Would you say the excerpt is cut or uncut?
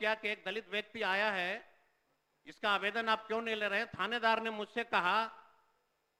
uncut